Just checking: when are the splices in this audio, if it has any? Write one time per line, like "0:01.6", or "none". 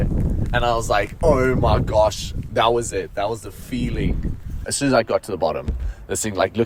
0:02.4
0:04.7